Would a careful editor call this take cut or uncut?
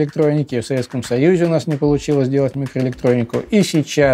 uncut